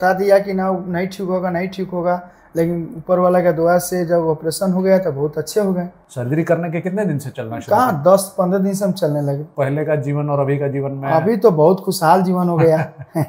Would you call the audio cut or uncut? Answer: cut